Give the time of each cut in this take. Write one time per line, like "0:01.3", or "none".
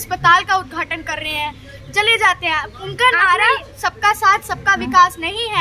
none